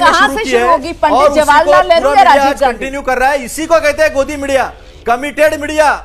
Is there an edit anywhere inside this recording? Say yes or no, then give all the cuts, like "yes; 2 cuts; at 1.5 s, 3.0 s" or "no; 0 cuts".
no; 0 cuts